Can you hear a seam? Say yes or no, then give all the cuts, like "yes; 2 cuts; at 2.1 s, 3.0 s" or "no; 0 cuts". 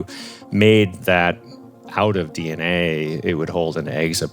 no; 0 cuts